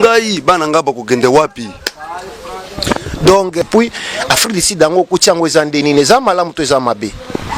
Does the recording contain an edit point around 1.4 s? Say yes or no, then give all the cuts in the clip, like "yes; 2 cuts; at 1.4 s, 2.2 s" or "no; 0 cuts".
no; 1 cut; at 3.6 s